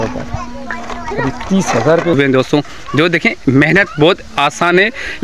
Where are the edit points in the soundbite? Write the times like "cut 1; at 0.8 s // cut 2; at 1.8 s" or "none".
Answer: cut 1; at 2.2 s